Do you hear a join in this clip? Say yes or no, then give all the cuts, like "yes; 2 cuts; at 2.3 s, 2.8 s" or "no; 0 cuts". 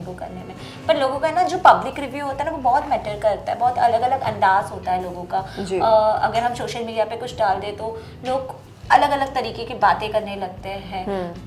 no; 0 cuts